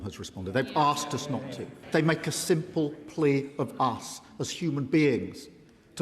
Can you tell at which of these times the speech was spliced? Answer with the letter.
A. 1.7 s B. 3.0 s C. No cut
A